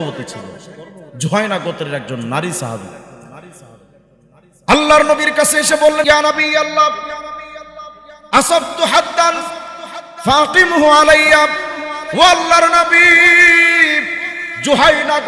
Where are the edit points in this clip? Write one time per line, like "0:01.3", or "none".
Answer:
0:06.0